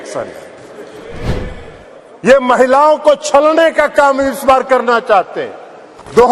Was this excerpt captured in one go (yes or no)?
no